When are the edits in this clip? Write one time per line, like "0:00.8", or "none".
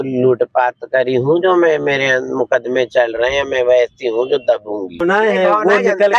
0:05.0